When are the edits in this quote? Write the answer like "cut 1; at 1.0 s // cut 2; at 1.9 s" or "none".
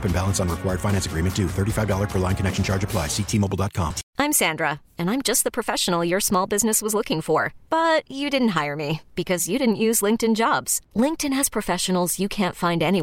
cut 1; at 4.0 s